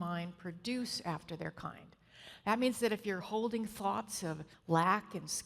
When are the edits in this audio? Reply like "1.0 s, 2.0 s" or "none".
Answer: 4.5 s